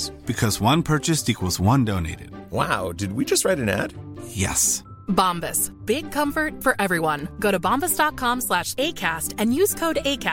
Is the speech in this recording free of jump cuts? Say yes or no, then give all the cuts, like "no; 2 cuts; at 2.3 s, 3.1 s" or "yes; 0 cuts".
yes; 0 cuts